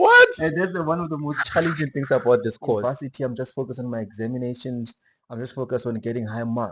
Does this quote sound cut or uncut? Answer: cut